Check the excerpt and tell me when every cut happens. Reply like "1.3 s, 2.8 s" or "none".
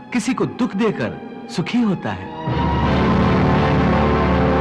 none